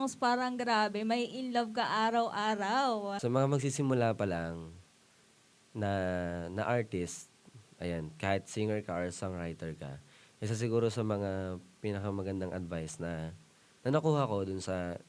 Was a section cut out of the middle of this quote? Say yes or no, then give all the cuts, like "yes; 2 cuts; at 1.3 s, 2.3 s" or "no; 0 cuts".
yes; 1 cut; at 3.2 s